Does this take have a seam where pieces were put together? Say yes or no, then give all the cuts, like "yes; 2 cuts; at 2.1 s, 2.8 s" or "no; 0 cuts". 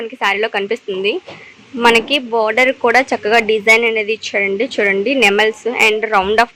no; 0 cuts